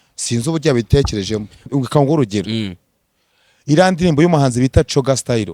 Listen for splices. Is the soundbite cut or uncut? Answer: cut